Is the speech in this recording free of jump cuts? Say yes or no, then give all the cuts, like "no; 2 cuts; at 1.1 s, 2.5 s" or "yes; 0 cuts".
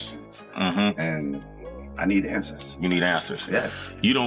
yes; 0 cuts